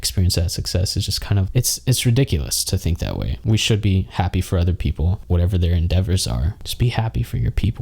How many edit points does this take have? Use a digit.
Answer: 2